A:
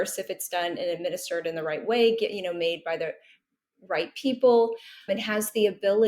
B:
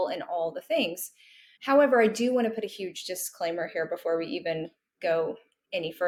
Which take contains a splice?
A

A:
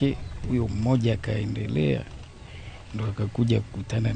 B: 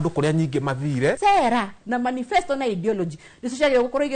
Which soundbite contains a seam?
B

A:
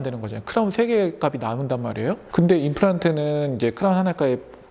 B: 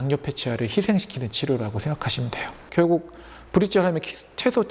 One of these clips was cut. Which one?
B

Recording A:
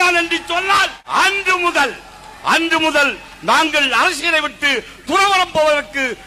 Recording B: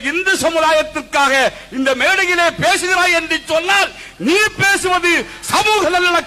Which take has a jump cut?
A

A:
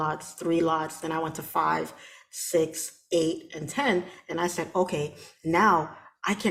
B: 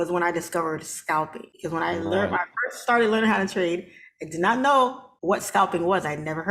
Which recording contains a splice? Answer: B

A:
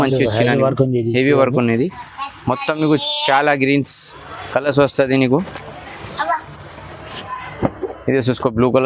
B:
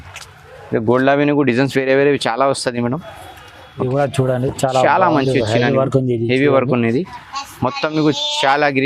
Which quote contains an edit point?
B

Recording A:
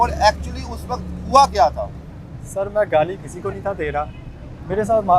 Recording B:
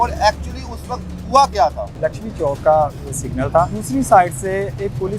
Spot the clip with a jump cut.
B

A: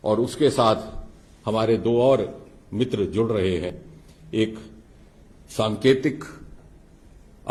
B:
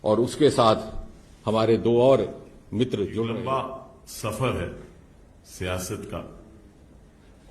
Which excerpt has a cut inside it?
B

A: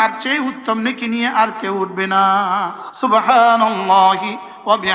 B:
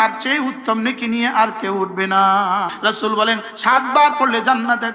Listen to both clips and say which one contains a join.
B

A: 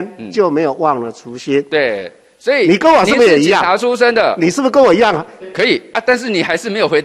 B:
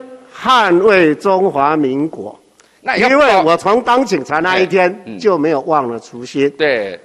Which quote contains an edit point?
A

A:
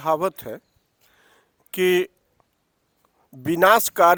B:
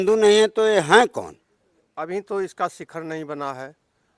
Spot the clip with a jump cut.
B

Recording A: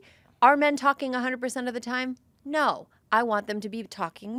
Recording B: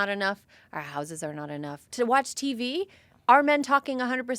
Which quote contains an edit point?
B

